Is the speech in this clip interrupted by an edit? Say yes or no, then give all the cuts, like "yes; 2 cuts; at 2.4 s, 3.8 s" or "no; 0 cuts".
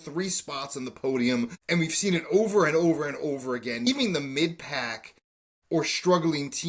yes; 2 cuts; at 1.6 s, 3.8 s